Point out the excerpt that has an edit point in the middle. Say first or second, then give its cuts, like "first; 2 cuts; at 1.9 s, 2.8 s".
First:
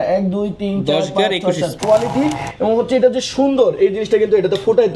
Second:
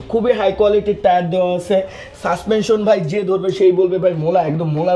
first; 1 cut; at 1.8 s